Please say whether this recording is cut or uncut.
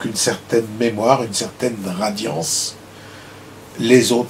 uncut